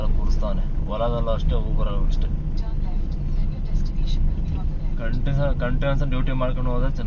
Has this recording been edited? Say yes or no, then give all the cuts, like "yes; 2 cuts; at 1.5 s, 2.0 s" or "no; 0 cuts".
no; 0 cuts